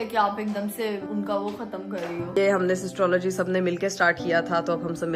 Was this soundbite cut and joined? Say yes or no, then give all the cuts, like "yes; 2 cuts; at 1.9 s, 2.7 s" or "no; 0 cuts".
yes; 2 cuts; at 1.0 s, 2.4 s